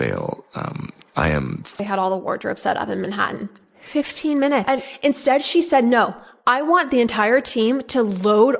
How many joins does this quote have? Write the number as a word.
one